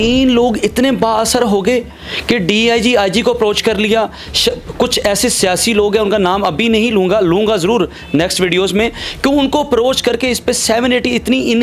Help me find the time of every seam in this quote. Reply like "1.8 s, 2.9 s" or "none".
none